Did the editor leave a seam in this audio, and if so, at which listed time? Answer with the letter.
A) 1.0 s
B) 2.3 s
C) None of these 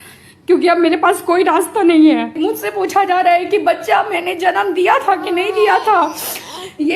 B